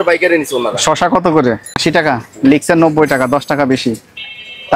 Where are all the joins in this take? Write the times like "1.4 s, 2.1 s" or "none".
1.7 s